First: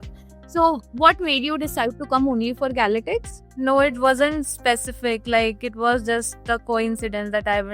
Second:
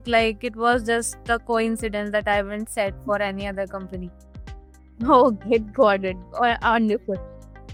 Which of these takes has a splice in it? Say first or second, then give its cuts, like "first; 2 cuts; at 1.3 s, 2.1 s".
first; 1 cut; at 3.4 s